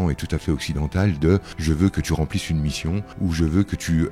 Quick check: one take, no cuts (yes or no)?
no